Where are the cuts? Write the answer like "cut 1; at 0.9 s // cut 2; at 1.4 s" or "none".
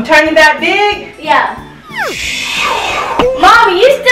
none